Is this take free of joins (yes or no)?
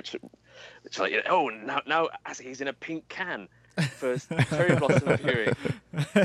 yes